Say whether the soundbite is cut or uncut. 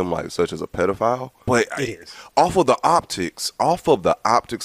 cut